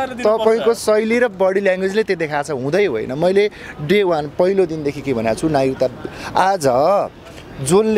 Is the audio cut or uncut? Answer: uncut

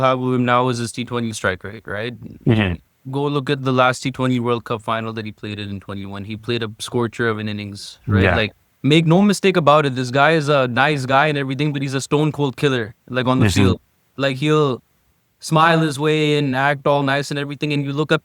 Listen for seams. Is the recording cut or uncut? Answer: uncut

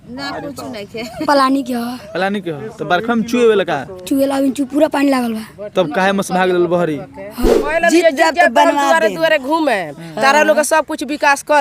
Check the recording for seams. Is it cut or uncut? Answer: cut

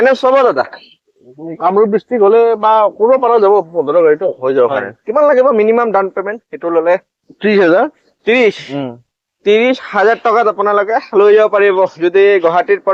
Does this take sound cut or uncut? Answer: uncut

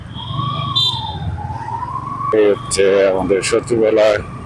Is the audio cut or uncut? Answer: cut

